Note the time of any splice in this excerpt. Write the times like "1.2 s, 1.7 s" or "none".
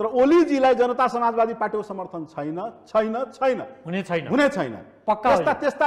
none